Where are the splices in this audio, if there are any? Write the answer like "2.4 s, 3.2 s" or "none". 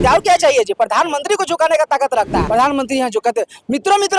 2.4 s